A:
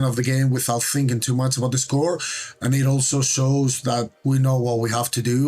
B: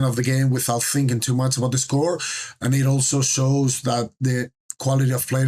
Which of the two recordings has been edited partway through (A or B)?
A